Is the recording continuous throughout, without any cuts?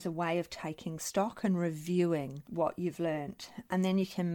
no; 1 cut; at 2.4 s

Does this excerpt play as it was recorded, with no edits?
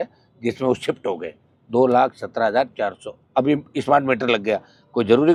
yes; 0 cuts

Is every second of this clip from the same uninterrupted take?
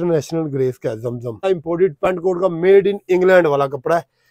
no; 1 cut; at 1.4 s

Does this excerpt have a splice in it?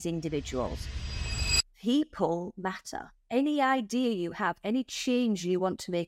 yes; 2 cuts; at 1.3 s, 3.2 s

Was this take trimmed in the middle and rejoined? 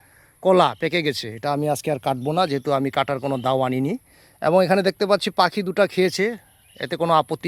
no; 0 cuts

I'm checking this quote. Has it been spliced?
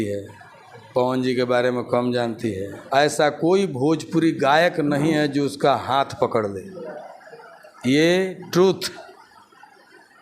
yes; 1 cut; at 2.7 s

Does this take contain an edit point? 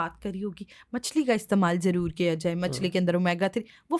no; 0 cuts

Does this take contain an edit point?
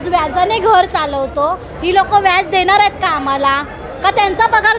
no; 0 cuts

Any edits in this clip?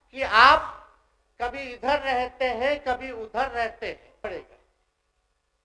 yes; 1 cut; at 4.2 s

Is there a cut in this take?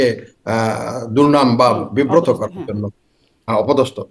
no; 0 cuts

